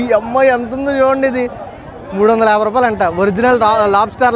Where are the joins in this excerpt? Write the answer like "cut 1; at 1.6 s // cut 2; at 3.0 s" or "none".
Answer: none